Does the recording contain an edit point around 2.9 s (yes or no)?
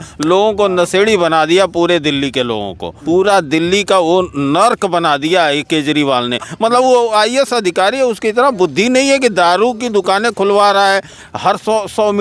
yes